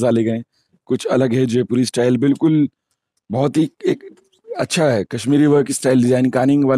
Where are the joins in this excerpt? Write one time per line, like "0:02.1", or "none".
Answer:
none